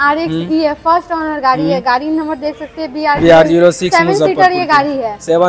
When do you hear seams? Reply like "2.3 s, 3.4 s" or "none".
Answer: none